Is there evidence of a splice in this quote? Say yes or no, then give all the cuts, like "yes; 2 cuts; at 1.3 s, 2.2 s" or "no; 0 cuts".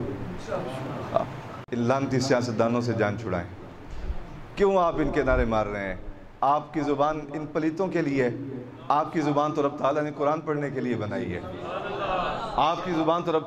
yes; 1 cut; at 1.5 s